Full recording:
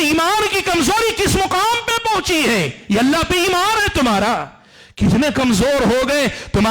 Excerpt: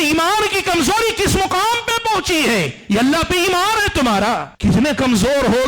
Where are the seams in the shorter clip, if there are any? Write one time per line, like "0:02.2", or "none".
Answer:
0:04.5